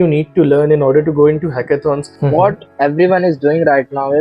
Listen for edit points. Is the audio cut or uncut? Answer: cut